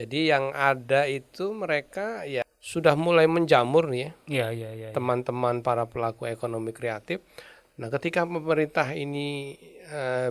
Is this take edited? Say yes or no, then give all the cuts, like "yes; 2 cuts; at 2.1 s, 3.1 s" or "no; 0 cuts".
yes; 1 cut; at 2.5 s